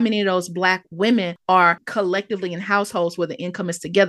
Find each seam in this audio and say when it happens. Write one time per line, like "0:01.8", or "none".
0:01.6